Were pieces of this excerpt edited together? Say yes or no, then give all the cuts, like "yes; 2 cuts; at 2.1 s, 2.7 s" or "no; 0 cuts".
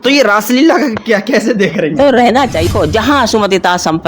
yes; 1 cut; at 2.7 s